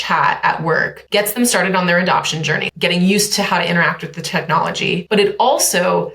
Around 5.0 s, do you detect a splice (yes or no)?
yes